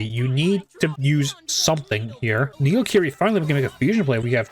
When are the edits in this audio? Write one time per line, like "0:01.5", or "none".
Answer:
0:01.0
0:02.5